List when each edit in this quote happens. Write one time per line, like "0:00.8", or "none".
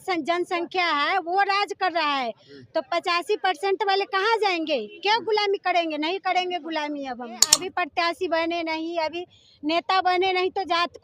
0:07.6